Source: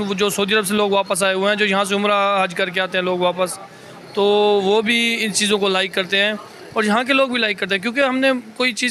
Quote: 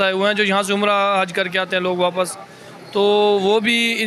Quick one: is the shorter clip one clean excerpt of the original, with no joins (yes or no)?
yes